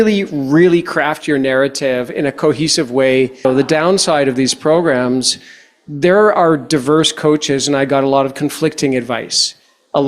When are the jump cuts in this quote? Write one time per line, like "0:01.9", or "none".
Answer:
0:03.5